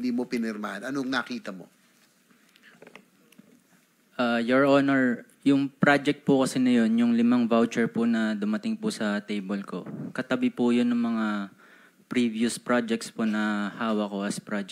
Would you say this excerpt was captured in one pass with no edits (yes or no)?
yes